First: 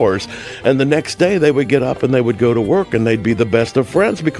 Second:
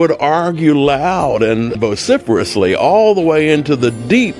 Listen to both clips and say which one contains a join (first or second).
second